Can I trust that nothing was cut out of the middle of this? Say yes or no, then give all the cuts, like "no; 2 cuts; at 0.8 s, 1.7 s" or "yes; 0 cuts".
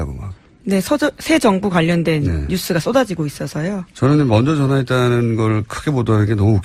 yes; 0 cuts